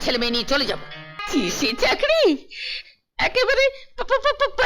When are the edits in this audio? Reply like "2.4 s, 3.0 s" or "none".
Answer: 1.1 s